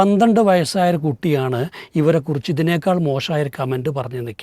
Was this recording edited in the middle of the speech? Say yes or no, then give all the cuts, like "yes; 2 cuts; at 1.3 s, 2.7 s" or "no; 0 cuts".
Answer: no; 0 cuts